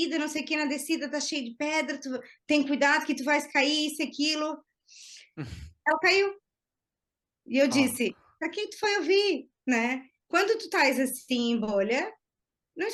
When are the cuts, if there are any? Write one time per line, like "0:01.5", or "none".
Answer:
none